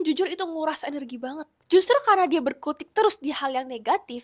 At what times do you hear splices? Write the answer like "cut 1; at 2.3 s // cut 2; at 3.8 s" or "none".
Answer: cut 1; at 1.6 s